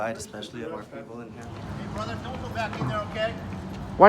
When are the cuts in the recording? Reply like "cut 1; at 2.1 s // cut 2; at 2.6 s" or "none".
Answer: cut 1; at 1.5 s